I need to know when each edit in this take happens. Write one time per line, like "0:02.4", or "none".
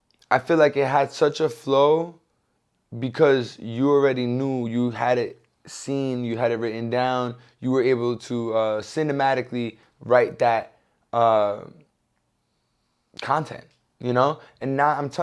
none